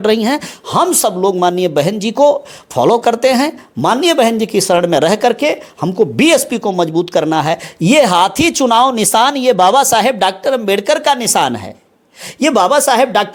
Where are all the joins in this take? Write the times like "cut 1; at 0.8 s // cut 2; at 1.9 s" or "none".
none